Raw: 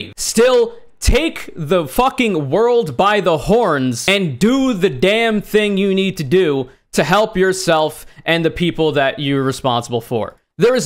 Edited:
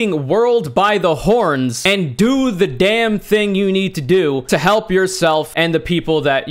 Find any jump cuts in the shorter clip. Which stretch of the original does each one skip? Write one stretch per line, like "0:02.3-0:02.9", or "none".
0:06.6-0:06.9
0:08.0-0:08.2